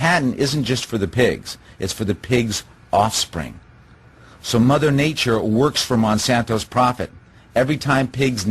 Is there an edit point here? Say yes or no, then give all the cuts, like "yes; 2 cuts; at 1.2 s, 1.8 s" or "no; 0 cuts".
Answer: no; 0 cuts